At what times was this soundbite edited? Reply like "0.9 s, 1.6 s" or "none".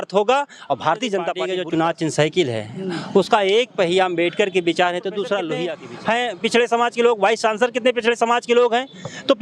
1.5 s, 5.7 s